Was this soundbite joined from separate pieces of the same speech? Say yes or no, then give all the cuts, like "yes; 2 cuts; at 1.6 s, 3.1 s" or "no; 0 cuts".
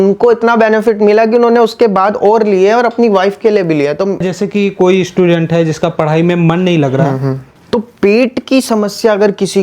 yes; 2 cuts; at 4.2 s, 7.5 s